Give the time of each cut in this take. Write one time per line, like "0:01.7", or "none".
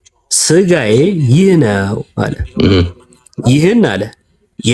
none